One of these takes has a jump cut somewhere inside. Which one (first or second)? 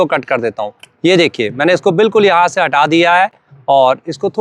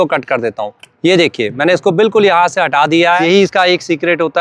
second